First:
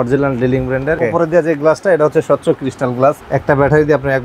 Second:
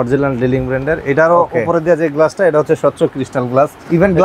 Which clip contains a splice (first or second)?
first